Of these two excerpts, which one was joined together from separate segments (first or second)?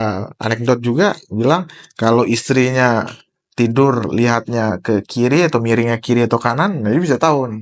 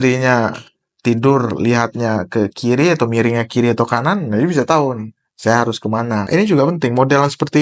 second